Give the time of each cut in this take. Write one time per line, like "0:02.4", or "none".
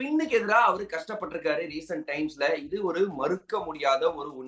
none